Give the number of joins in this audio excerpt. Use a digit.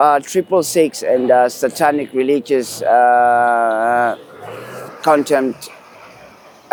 0